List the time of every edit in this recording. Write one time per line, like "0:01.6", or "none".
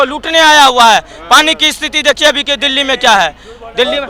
none